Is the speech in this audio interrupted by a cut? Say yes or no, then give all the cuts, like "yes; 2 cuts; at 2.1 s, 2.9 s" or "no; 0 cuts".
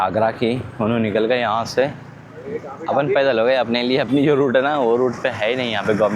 no; 0 cuts